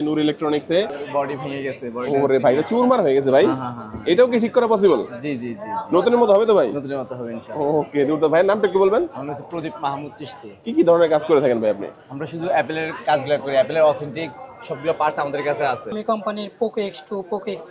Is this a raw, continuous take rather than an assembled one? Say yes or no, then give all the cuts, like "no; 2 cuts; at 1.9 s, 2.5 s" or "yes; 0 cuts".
no; 2 cuts; at 1.0 s, 16.0 s